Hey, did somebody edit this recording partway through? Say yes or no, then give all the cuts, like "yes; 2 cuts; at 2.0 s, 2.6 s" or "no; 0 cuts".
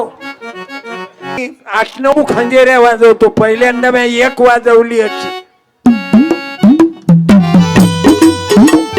yes; 1 cut; at 1.5 s